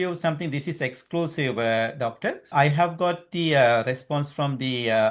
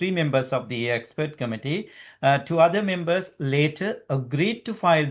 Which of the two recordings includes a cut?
first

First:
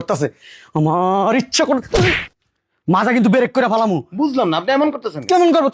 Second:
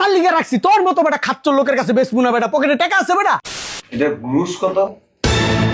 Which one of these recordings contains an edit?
second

